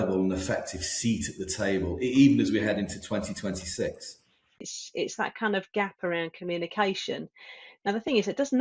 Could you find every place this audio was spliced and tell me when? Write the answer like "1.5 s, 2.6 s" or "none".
4.7 s